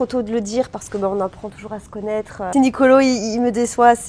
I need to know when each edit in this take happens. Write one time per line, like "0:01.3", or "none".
0:02.5